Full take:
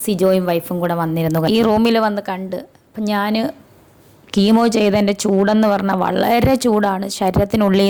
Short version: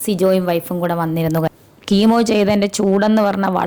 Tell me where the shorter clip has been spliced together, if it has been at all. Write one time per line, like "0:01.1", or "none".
0:01.5